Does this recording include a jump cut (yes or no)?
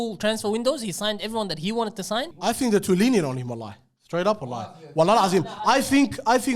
yes